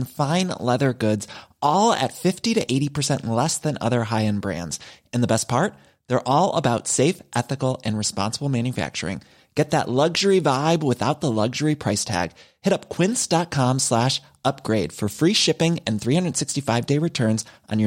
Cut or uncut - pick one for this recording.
uncut